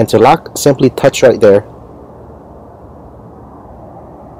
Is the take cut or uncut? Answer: uncut